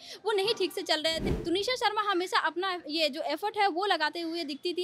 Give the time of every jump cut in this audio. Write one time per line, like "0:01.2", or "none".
0:01.2